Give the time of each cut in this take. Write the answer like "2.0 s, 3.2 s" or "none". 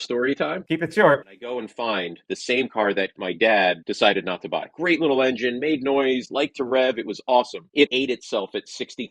2.2 s, 4.7 s, 7.9 s